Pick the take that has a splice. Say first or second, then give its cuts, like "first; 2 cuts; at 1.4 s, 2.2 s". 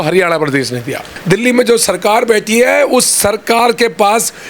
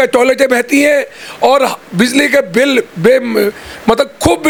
first; 1 cut; at 1.1 s